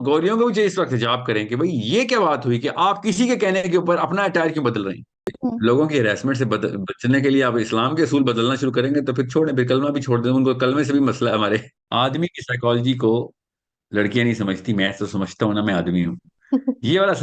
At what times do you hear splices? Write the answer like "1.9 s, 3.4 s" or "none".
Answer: 5.2 s, 11.8 s

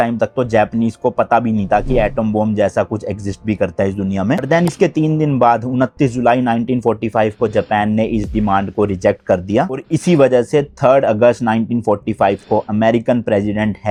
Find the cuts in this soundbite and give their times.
none

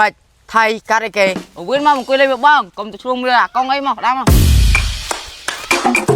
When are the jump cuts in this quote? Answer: 1.5 s

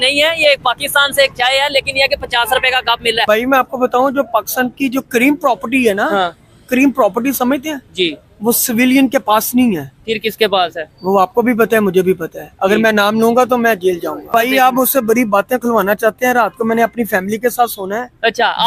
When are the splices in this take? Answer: 3.2 s, 14.3 s

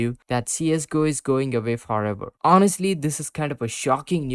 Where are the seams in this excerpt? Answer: 2.3 s

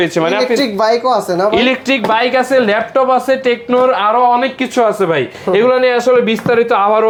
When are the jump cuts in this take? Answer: none

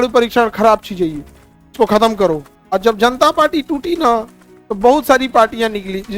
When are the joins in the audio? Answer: 2.5 s

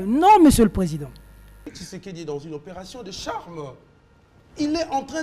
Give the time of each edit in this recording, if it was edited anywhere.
1.8 s

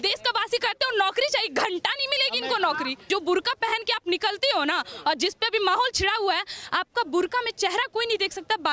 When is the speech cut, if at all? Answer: 3.0 s

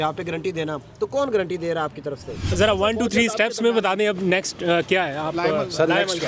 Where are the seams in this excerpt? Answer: 2.5 s

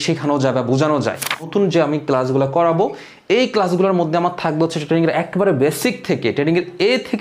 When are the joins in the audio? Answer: 1.5 s

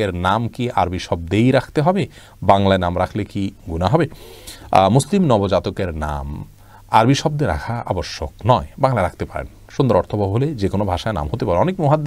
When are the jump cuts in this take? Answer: none

